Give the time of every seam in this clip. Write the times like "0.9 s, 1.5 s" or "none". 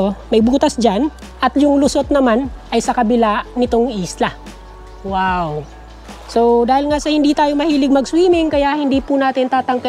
none

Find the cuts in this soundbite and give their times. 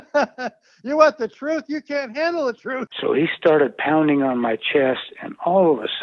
2.9 s

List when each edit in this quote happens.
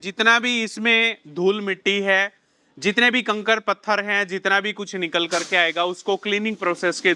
none

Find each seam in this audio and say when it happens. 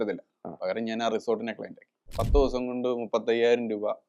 2.1 s

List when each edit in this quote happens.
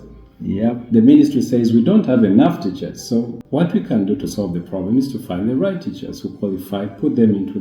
3.4 s

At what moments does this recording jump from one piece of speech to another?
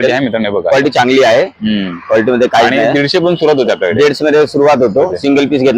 none

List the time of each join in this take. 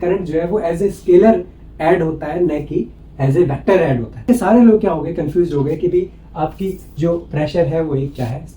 4.2 s

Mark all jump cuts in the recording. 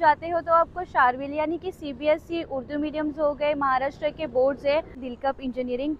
5.0 s

